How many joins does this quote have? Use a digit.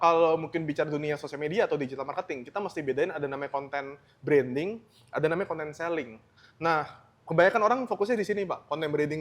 0